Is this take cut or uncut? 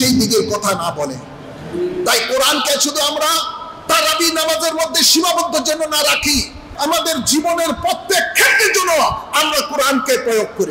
cut